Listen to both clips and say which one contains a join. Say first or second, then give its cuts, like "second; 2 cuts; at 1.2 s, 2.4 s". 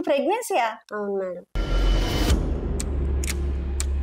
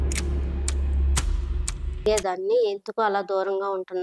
second; 1 cut; at 2.1 s